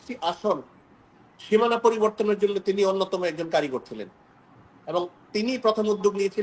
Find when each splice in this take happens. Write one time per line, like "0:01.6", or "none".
none